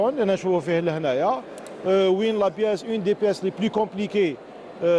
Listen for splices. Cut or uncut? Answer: cut